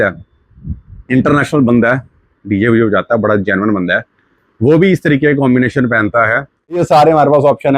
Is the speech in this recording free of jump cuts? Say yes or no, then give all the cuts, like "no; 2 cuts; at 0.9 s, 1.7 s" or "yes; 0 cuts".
no; 1 cut; at 6.8 s